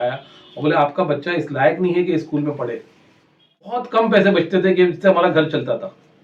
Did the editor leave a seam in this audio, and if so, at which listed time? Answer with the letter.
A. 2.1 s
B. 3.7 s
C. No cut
B